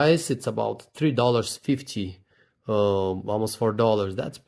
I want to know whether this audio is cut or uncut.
uncut